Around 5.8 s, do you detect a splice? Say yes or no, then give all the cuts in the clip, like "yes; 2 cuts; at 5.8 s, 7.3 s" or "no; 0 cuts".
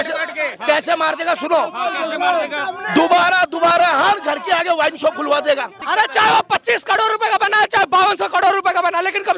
yes; 1 cut; at 5.8 s